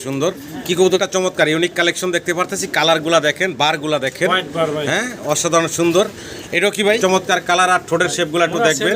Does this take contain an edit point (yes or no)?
yes